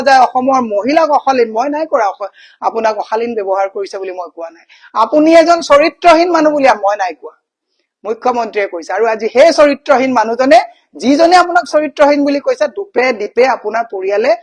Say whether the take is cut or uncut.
uncut